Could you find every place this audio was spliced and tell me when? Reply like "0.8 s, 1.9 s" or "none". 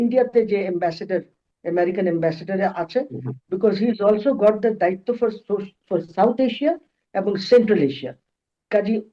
none